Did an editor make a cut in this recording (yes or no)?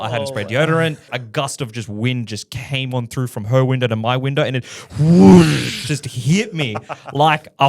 yes